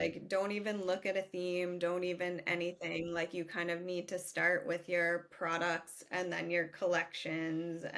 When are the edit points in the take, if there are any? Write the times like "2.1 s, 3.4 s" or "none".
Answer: none